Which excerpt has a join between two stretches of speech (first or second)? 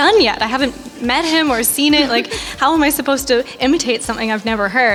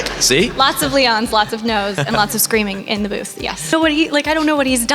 second